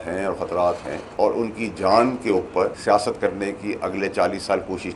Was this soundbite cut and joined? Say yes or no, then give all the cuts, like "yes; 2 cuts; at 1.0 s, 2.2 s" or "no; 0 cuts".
yes; 2 cuts; at 1.0 s, 2.8 s